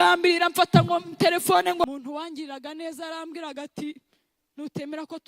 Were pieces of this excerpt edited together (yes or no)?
yes